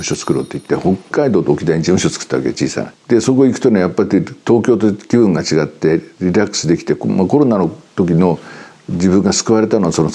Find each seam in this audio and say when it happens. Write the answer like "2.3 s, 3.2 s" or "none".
2.9 s